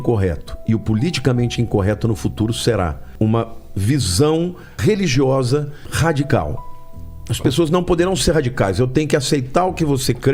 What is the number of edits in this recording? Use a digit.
3